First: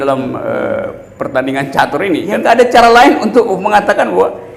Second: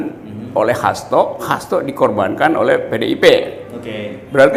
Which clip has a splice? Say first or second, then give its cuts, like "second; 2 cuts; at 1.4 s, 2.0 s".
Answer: first; 1 cut; at 2.3 s